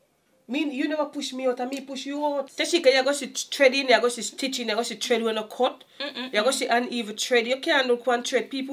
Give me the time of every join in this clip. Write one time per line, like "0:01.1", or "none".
0:02.5